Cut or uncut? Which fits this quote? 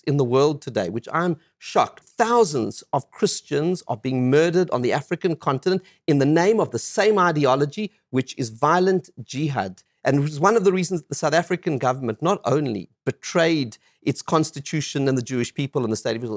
cut